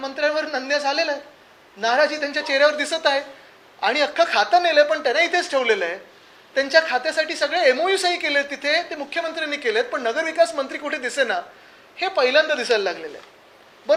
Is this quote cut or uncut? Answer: uncut